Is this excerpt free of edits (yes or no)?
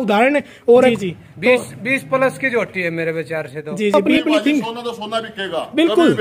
no